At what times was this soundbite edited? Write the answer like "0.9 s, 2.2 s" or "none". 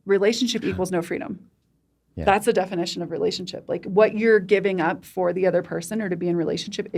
none